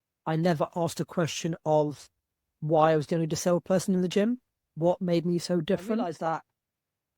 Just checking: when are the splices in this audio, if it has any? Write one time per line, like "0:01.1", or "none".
0:06.1